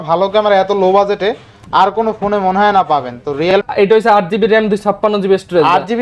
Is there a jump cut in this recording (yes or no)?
yes